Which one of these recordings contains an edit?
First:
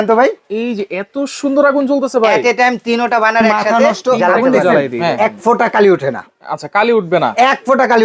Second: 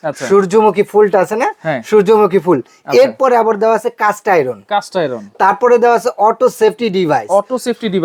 first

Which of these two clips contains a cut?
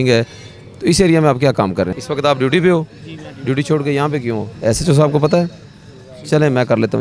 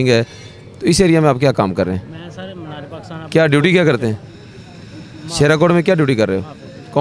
first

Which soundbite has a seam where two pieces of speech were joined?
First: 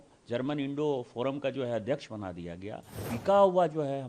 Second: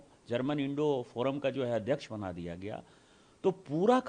first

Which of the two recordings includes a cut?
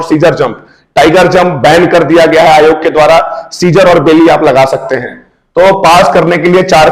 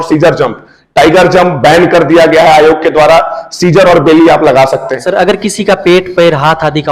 second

